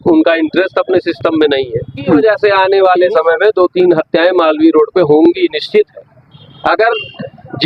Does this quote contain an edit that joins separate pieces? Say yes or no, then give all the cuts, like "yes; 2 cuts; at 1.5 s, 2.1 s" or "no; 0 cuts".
yes; 1 cut; at 2.2 s